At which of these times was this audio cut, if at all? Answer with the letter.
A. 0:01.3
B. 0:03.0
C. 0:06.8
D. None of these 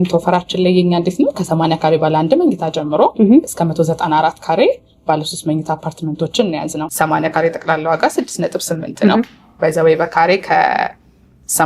C